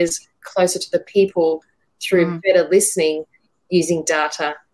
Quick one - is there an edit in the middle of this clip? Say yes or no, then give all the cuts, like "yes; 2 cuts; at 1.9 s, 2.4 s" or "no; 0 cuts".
yes; 1 cut; at 2.3 s